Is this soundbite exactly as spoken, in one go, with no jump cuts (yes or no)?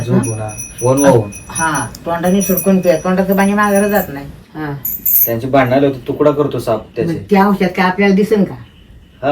no